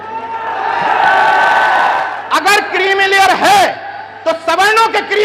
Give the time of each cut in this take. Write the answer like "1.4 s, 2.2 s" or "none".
2.1 s